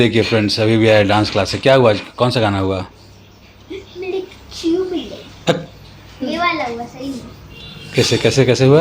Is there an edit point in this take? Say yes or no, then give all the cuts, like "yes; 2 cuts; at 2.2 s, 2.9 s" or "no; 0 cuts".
no; 0 cuts